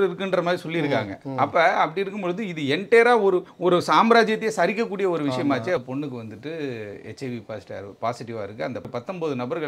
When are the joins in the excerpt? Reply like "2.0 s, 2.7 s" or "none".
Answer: 3.5 s, 5.8 s, 8.9 s